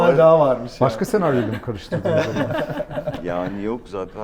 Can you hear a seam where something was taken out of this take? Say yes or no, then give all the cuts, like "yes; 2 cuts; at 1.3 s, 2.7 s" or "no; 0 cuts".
no; 0 cuts